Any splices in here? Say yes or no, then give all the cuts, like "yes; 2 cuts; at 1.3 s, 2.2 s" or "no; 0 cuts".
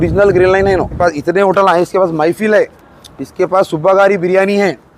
yes; 1 cut; at 1.0 s